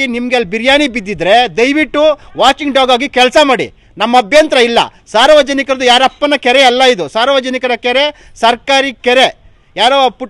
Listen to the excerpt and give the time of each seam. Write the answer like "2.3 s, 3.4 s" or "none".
none

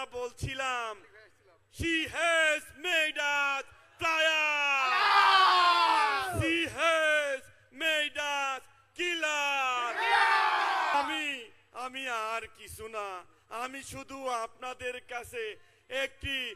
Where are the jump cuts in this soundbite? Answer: 10.9 s

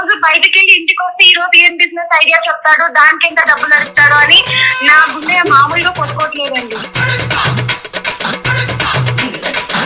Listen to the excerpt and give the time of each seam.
6.9 s

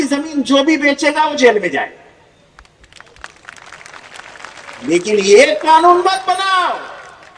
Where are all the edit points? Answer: none

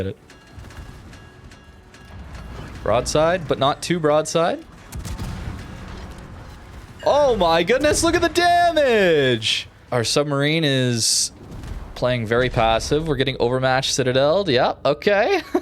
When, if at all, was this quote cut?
9.8 s

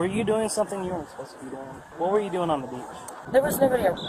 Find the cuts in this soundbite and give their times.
1.9 s, 3.2 s

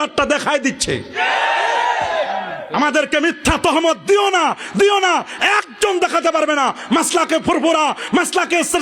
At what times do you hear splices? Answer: none

